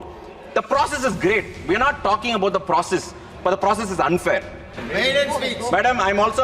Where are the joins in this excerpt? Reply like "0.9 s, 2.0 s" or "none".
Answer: 4.8 s